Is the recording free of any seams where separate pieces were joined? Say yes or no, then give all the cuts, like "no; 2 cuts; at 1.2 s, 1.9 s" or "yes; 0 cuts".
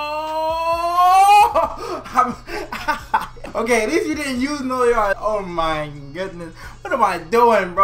no; 2 cuts; at 3.4 s, 5.2 s